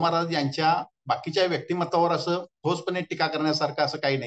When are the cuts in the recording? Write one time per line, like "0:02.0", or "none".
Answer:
0:00.9
0:02.5

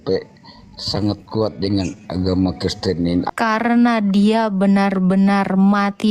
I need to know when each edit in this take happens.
0:03.2

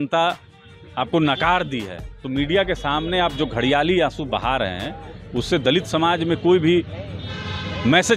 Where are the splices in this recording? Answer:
none

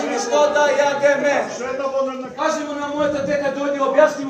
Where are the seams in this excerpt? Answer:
0:02.3

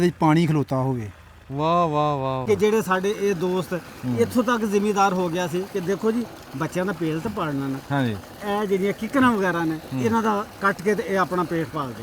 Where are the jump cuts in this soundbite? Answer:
0:02.4

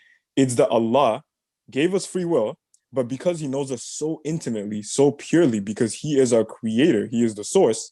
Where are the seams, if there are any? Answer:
none

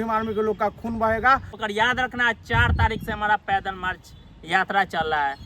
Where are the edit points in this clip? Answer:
0:01.6

